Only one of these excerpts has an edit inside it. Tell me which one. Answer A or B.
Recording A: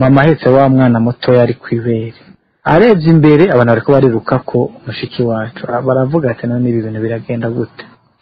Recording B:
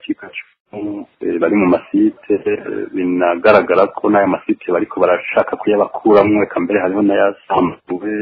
B